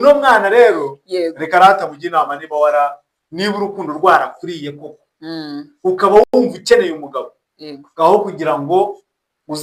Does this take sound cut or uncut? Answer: uncut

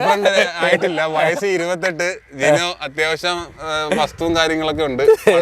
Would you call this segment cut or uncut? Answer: uncut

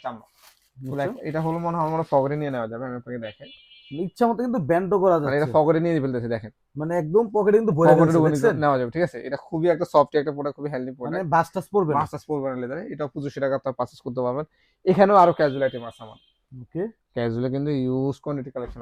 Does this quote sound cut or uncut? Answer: uncut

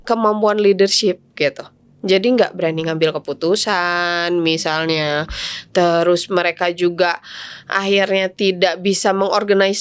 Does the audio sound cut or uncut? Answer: uncut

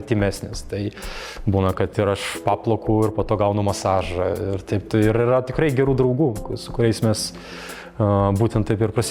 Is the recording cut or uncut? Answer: uncut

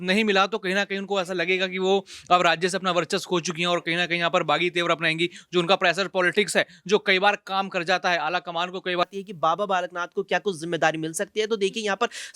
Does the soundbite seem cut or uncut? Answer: cut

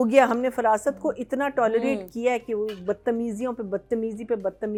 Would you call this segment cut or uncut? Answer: uncut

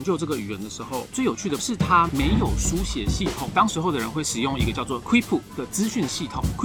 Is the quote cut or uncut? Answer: uncut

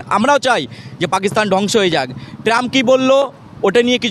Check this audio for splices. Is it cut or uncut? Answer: uncut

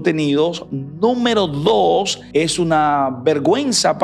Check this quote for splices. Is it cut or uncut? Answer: cut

